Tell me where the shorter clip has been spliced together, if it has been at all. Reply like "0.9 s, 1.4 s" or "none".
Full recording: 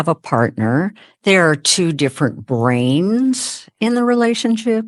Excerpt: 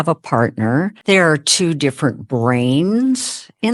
0.9 s